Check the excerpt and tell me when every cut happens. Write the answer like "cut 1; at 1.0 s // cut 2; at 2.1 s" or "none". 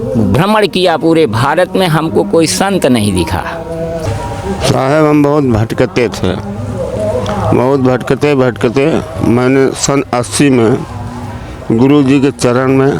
cut 1; at 4.1 s